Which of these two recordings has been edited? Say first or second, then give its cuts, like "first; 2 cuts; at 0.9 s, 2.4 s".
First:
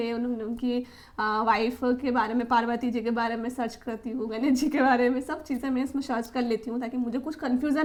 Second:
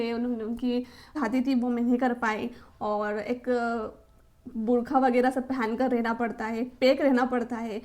second; 1 cut; at 1.1 s